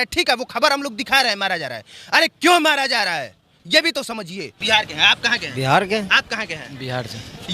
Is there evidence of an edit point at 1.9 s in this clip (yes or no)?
no